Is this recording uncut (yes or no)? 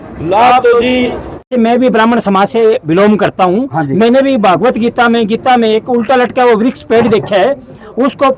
no